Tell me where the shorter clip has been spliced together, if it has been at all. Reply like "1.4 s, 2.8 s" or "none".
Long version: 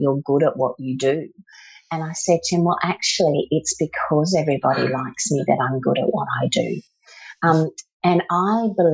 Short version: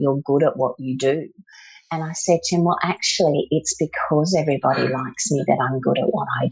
none

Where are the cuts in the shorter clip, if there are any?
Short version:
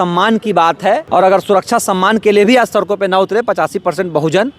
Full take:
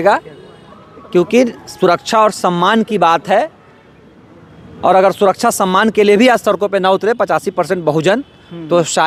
1.0 s

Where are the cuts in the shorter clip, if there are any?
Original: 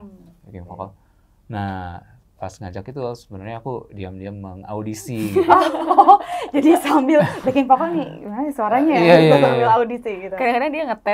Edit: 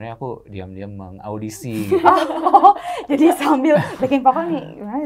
none

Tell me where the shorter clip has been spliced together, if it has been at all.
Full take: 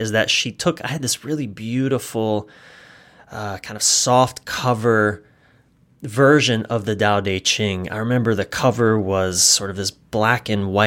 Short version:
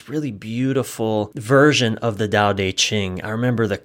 1.4 s

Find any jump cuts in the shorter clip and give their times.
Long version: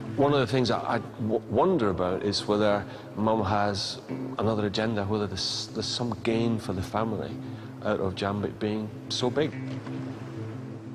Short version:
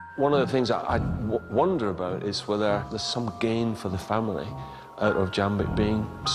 3.0 s

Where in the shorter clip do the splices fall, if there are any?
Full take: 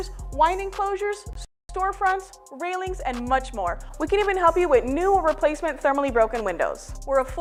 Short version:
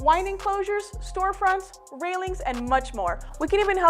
1.0 s

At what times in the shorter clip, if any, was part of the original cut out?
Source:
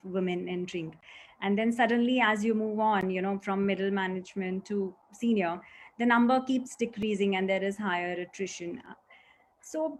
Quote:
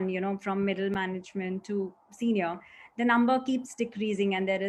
none

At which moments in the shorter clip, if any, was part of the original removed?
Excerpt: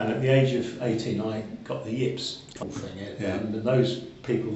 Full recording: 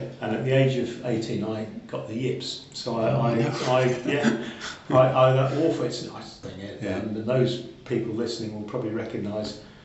2.5 s

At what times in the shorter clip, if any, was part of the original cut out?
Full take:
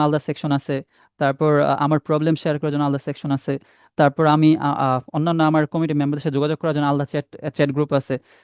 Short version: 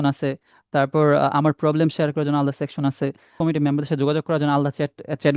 3.4 s

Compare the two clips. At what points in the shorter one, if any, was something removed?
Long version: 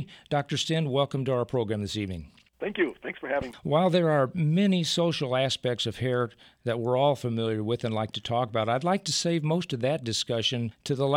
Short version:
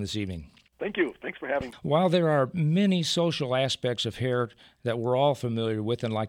none

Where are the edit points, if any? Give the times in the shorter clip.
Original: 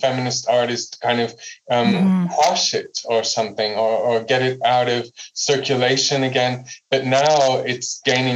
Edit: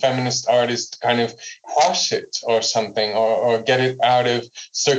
1.6 s

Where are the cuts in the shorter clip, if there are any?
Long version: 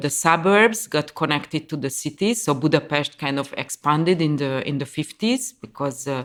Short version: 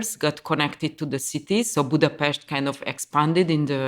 none

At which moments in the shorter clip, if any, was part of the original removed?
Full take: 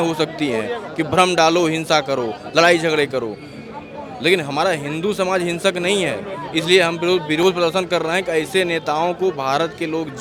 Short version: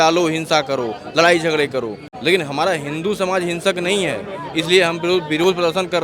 2.1 s

